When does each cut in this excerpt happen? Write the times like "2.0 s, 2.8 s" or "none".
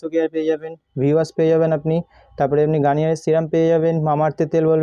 none

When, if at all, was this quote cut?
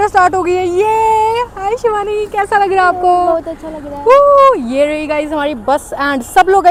none

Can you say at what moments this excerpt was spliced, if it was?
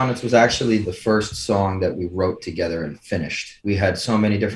0.8 s, 3.6 s

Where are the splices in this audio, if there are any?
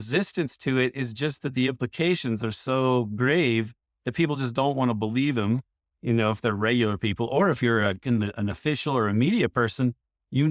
none

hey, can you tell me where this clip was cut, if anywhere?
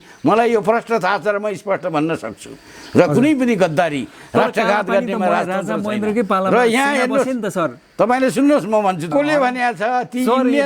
9.1 s

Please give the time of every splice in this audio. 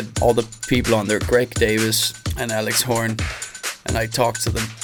none

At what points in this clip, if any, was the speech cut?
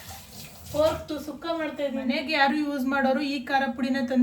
2.2 s

